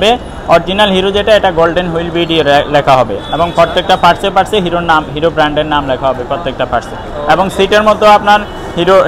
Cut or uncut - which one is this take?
uncut